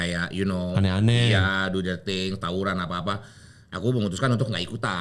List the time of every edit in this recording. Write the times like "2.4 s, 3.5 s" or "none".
none